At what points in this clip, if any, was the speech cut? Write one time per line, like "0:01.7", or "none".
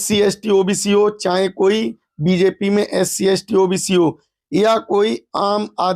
none